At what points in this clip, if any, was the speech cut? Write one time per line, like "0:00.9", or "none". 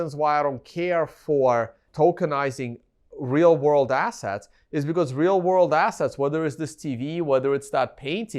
0:01.8